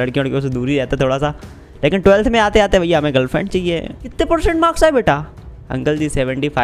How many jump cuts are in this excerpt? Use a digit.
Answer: 1